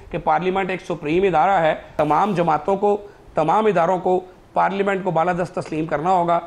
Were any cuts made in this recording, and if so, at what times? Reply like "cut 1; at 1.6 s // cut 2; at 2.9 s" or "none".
cut 1; at 1.8 s